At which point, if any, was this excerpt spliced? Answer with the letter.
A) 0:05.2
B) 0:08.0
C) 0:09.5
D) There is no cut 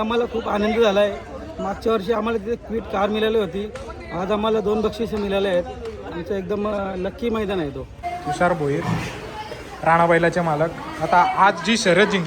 B